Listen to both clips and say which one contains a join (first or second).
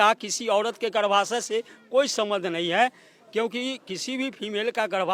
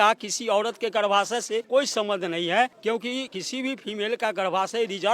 second